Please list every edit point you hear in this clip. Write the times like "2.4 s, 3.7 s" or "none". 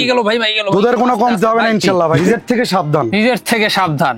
2.2 s